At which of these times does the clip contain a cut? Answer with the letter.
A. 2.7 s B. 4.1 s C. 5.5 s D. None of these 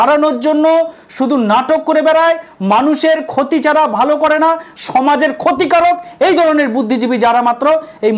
D